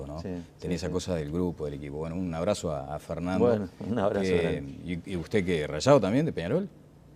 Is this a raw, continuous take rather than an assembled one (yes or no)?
no